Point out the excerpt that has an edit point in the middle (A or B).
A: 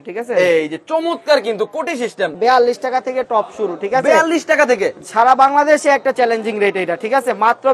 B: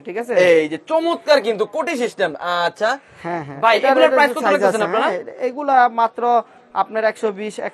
A